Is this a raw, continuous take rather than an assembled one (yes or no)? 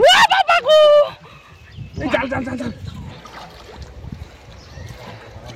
yes